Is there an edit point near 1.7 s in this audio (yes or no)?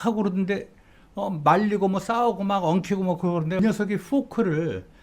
no